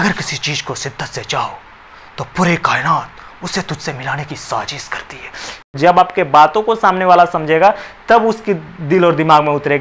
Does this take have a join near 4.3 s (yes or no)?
no